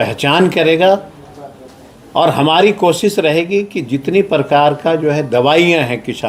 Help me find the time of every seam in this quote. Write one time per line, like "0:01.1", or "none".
none